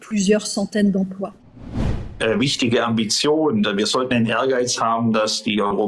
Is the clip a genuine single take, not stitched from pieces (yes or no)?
no